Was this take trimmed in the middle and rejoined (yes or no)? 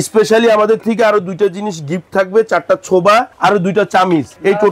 no